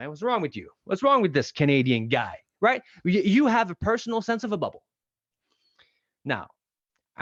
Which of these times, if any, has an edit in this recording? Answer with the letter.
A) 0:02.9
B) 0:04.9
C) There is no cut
C